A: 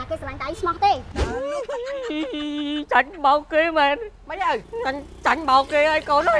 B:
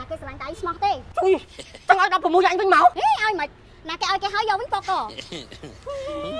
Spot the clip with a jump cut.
A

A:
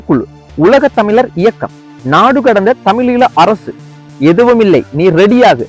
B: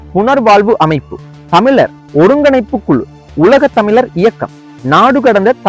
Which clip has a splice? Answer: A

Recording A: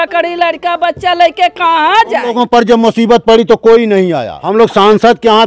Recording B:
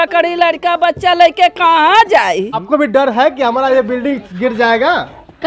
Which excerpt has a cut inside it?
A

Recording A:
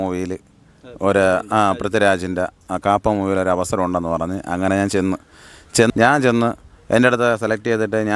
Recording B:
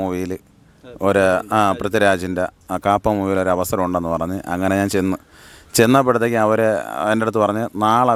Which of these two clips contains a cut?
A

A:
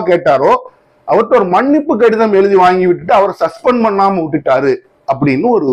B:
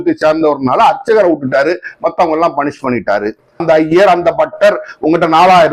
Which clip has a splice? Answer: B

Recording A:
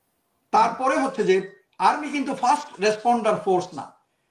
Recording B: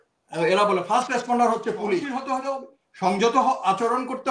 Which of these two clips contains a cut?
B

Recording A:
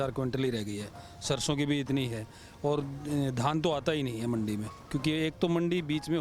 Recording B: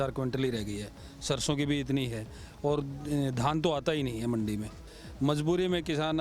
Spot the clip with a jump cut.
B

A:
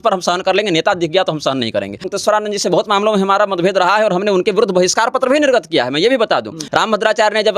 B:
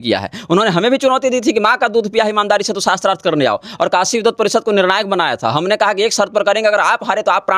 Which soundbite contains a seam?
A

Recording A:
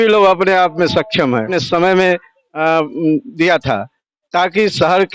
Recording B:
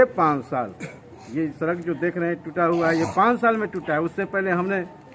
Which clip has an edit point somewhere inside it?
A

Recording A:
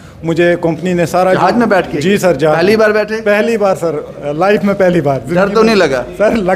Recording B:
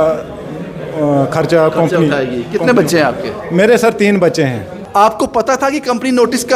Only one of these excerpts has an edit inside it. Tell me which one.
B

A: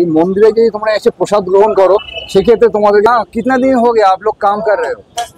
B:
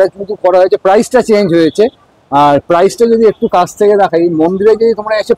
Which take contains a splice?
A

